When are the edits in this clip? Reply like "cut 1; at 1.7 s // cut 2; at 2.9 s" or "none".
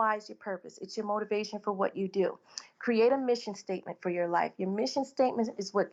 none